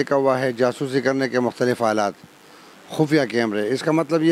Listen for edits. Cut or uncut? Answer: uncut